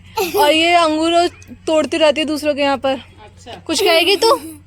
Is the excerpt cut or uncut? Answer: uncut